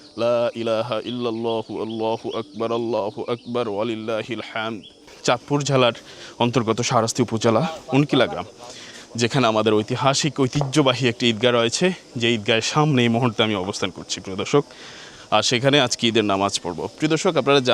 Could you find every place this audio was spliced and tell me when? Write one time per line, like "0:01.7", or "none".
0:05.0